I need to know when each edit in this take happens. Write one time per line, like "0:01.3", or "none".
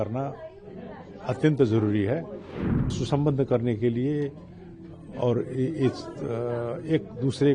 0:02.9